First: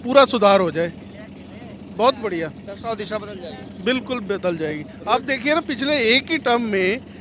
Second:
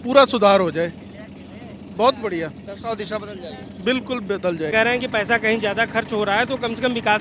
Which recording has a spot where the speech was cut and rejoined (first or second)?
second